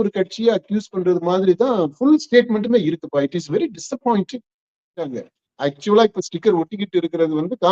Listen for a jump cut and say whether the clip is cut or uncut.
cut